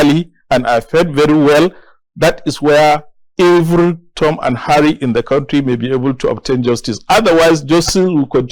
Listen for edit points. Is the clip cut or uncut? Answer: uncut